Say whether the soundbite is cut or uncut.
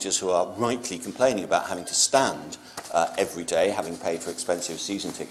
uncut